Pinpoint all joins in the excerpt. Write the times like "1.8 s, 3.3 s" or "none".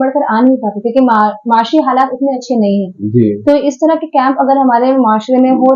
none